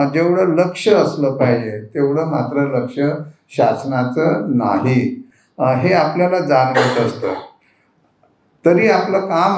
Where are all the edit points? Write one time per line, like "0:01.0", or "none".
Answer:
none